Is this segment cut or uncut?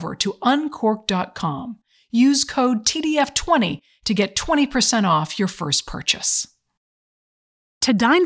cut